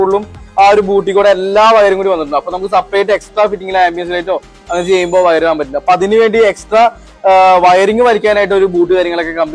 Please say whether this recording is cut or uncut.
uncut